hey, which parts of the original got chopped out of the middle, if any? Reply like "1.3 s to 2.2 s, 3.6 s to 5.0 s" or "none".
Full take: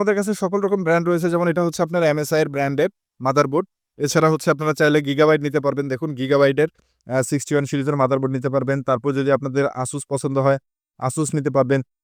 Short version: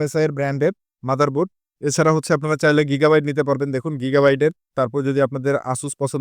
6.9 s to 8.8 s